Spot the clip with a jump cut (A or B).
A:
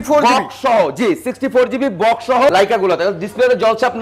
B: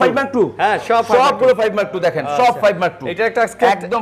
A